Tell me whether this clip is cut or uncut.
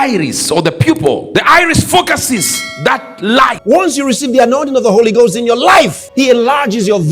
cut